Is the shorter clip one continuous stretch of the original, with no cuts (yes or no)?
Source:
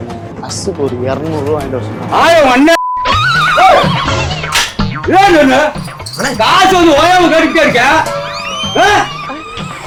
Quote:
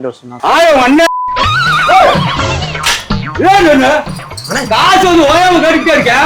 yes